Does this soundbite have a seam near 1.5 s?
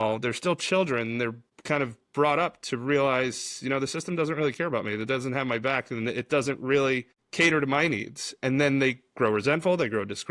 yes; 2 cuts; at 1.5 s, 7.2 s

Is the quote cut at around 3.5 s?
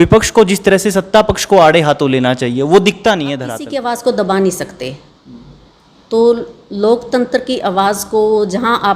yes; 1 cut; at 3.5 s

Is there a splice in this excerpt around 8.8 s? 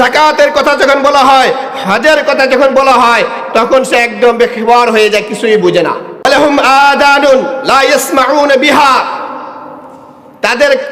no; 1 cut; at 6.3 s

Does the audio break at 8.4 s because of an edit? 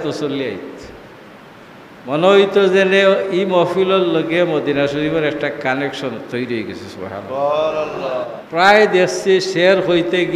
yes; 1 cut; at 8.4 s

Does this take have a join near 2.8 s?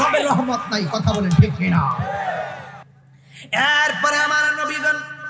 yes; 1 cut; at 2.8 s

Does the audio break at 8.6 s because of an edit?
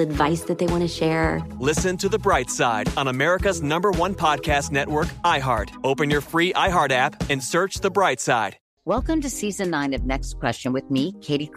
yes; 1 cut; at 8.6 s

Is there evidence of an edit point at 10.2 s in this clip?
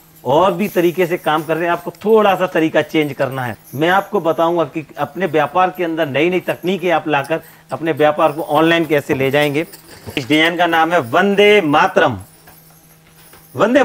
yes; 2 cuts; at 3.9 s, 10.2 s

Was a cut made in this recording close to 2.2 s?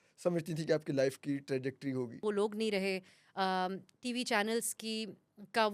yes; 1 cut; at 2.2 s

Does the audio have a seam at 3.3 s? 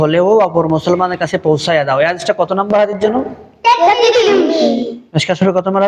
no; 0 cuts

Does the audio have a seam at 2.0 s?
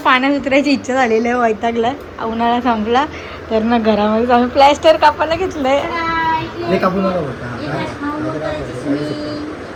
no; 0 cuts

